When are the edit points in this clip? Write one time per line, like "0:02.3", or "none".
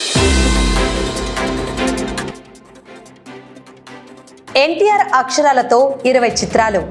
0:02.4
0:04.2